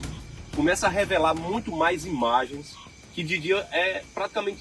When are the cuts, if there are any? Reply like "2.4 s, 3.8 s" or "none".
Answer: none